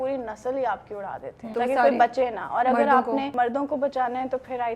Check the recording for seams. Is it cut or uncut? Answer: cut